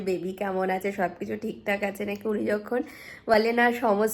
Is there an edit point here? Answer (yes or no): no